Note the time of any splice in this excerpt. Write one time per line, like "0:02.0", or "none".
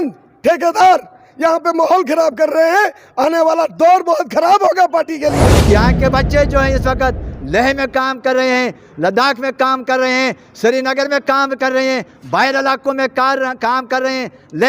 0:05.6